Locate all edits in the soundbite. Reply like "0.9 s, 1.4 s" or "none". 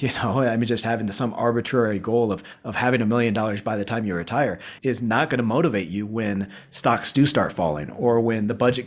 none

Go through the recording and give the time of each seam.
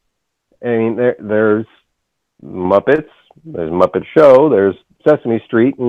none

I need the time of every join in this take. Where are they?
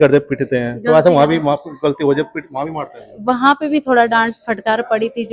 none

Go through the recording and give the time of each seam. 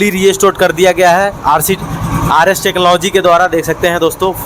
none

